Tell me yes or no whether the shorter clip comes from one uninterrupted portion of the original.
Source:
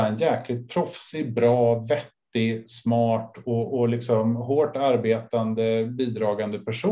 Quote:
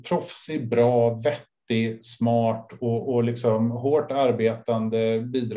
yes